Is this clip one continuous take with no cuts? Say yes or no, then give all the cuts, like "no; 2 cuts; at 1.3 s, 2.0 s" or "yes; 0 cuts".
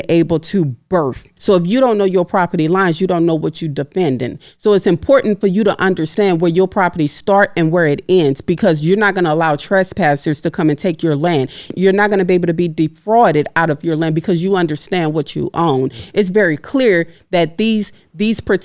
no; 3 cuts; at 1.3 s, 11.7 s, 16.0 s